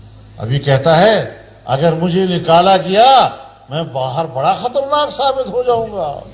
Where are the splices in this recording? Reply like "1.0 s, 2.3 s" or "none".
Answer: none